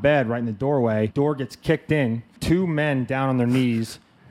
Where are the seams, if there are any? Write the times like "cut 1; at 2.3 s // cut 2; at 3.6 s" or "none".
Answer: cut 1; at 1.1 s // cut 2; at 2.4 s